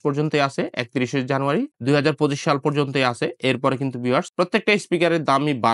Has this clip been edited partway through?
no; 0 cuts

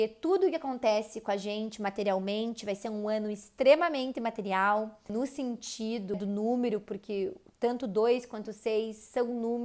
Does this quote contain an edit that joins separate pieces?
yes; 2 cuts; at 5.1 s, 6.1 s

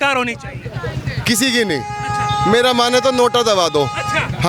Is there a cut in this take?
no; 0 cuts

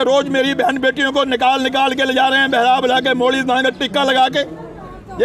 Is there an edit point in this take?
no; 0 cuts

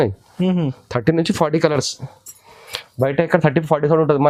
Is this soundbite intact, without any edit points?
yes; 0 cuts

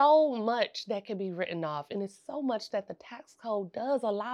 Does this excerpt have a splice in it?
no; 0 cuts

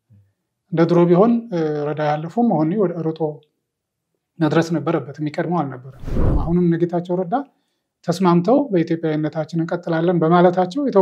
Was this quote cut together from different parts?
yes; 1 cut; at 6.4 s

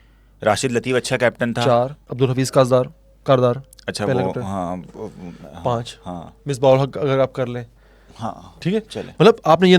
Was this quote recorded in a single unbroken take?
no; 1 cut; at 2.0 s

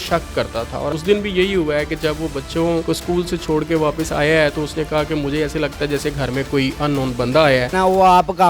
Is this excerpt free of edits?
no; 3 cuts; at 0.9 s, 2.8 s, 7.7 s

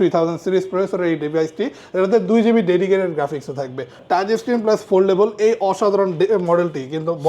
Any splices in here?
yes; 1 cut; at 4.0 s

